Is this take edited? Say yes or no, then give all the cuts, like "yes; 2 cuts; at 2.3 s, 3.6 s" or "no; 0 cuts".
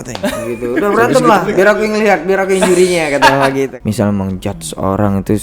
yes; 1 cut; at 3.7 s